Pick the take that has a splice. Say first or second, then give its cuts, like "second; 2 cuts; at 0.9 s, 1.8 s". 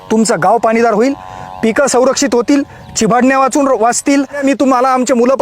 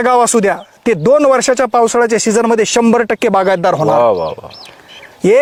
first; 1 cut; at 4.4 s